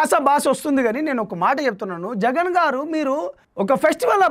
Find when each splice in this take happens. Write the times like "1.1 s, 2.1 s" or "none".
3.4 s